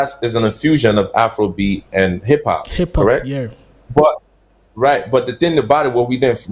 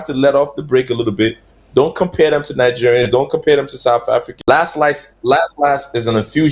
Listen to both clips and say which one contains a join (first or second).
second